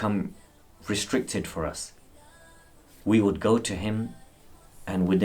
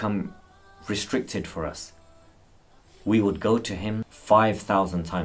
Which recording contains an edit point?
second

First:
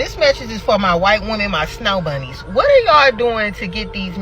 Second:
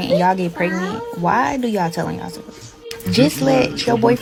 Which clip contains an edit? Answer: first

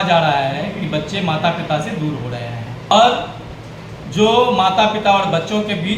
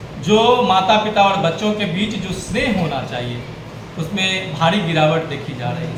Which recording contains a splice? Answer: first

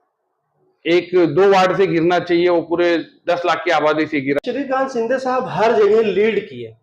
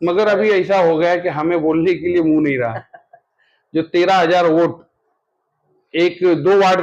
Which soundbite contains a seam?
first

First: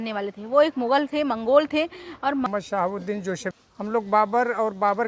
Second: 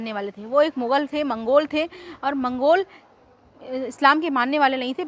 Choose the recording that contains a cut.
first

